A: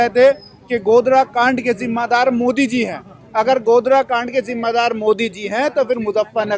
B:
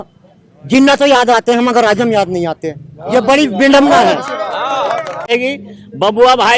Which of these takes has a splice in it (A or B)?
B